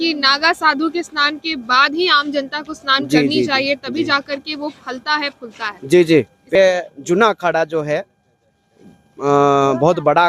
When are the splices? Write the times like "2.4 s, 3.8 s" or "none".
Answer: 6.6 s